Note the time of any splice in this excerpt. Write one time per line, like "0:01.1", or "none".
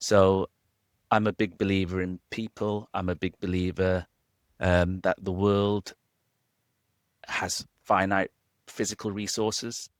none